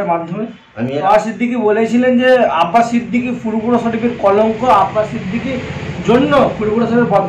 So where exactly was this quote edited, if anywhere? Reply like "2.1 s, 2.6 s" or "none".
0.9 s